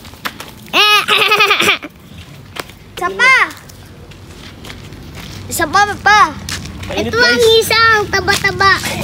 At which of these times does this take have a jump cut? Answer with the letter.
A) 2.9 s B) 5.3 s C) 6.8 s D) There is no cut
A